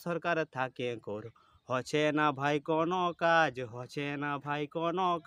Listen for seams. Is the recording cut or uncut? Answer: uncut